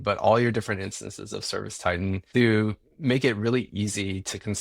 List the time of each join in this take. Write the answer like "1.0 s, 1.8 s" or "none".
2.2 s